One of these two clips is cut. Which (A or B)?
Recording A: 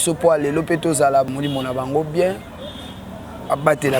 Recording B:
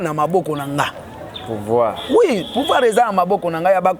A